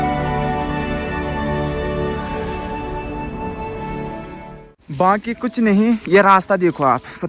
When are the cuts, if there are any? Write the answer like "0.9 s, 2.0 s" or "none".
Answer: none